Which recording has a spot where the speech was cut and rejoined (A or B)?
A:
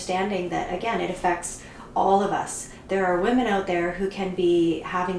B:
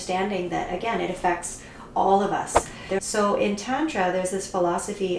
B